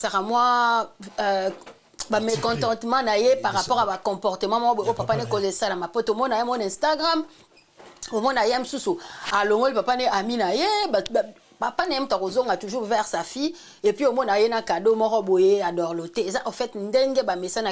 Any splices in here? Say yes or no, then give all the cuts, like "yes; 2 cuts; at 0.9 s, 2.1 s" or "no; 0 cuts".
no; 0 cuts